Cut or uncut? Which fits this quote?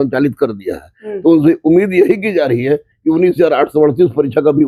uncut